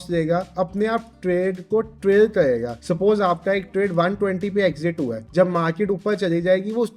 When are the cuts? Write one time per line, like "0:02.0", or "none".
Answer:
0:02.8
0:05.2